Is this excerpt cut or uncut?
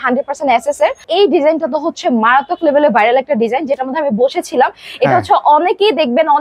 cut